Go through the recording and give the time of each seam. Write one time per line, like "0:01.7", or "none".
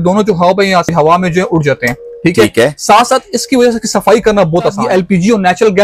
0:00.9
0:04.8